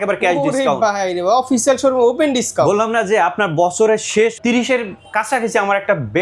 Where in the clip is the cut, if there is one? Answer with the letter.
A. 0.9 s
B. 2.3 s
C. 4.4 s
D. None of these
C